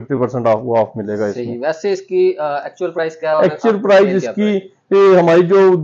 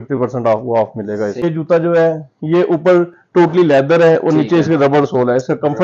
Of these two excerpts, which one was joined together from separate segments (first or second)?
second